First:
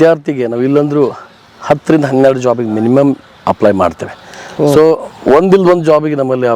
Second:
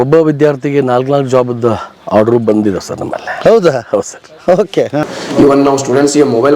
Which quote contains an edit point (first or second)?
second